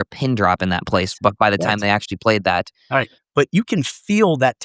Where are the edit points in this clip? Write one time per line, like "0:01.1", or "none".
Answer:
0:02.9